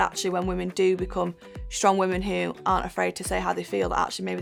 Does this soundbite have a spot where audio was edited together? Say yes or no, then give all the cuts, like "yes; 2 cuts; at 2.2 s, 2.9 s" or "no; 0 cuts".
no; 0 cuts